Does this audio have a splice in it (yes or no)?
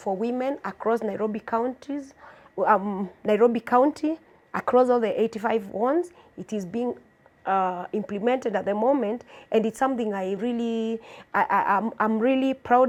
no